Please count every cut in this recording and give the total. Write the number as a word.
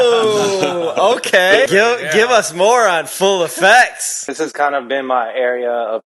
two